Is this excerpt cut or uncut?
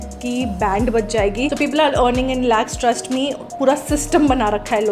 cut